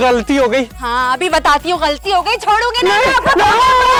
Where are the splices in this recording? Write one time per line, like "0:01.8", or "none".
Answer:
none

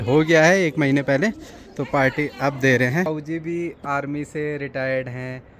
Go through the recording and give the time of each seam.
0:03.1

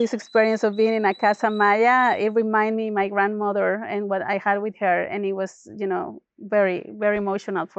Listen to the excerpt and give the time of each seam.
none

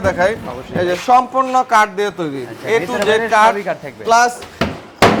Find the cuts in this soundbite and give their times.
none

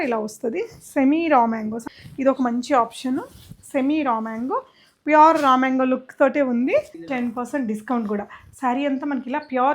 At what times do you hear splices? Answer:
0:01.9
0:07.0

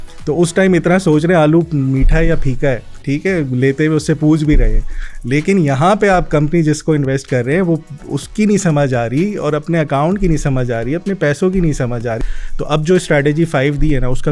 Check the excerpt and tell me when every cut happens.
0:12.2

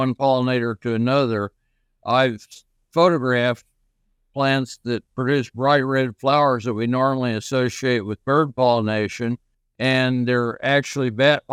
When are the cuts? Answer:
none

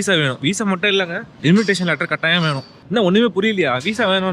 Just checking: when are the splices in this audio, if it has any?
0:01.2
0:02.7

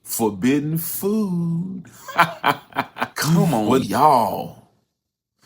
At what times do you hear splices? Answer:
0:03.4

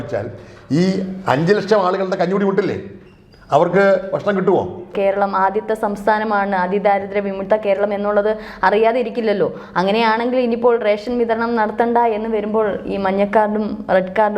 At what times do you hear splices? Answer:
0:04.9

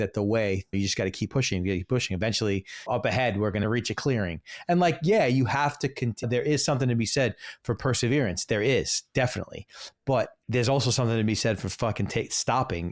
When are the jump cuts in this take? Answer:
0:00.7
0:02.8
0:03.6
0:06.2
0:10.4

